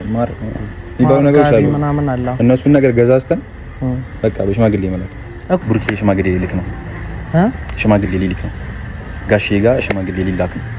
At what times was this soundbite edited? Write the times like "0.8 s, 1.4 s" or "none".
5.6 s